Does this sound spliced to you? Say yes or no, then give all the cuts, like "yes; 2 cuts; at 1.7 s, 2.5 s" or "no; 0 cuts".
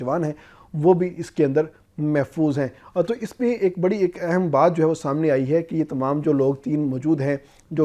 no; 0 cuts